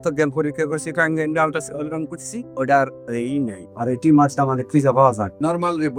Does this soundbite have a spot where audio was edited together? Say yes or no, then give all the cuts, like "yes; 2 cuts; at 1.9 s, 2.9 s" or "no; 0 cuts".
no; 0 cuts